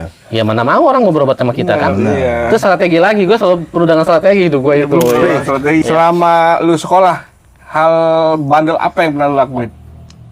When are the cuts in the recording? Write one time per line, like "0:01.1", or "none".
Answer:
0:05.8